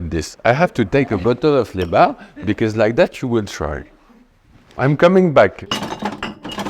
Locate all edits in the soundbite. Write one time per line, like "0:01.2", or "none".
0:05.6